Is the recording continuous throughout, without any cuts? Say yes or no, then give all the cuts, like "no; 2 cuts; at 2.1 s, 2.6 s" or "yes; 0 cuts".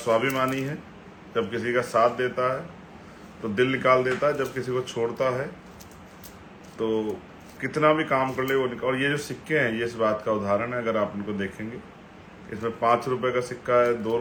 yes; 0 cuts